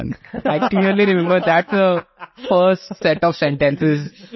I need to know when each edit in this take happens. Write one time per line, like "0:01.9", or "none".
none